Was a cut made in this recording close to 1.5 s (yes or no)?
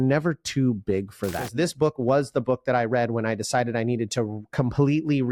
yes